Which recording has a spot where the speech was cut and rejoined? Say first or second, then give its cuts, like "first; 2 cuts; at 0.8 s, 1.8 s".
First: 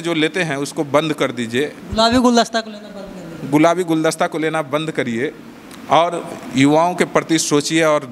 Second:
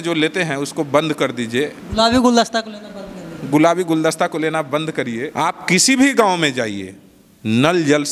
second; 1 cut; at 5.3 s